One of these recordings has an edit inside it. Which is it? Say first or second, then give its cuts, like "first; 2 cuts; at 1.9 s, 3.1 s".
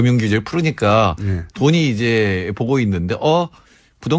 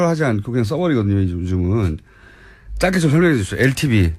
first; 1 cut; at 1.2 s